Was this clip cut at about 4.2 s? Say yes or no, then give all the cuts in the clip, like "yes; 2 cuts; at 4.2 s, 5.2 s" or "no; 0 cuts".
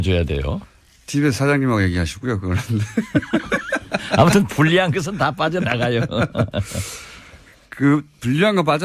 yes; 1 cut; at 4.2 s